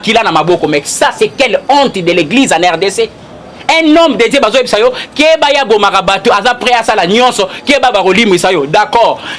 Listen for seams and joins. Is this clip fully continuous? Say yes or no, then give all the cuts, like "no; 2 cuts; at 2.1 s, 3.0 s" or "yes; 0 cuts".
yes; 0 cuts